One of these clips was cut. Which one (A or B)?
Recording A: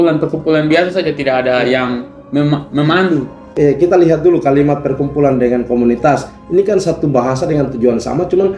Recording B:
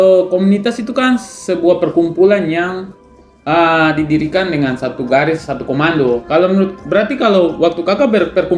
A